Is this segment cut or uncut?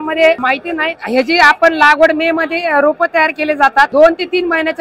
cut